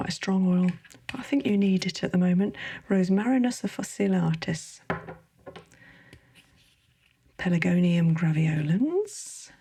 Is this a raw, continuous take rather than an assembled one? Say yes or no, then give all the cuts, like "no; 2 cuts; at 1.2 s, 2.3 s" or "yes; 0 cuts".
yes; 0 cuts